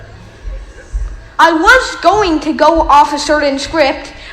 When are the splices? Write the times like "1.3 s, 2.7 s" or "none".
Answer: 1.3 s